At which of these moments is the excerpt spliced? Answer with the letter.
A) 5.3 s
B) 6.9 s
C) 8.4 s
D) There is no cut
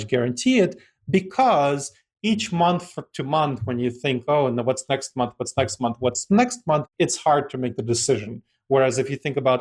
B